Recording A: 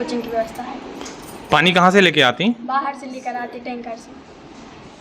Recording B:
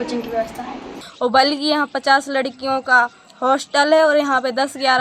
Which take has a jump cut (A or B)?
B